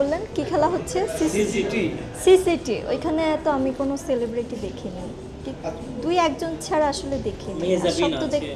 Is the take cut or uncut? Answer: uncut